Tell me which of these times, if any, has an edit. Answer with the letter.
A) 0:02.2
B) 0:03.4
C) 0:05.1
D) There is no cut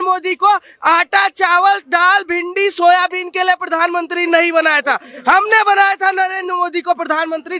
D